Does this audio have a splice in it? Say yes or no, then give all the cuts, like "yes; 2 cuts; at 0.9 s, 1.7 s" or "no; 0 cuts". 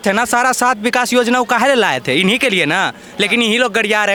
no; 0 cuts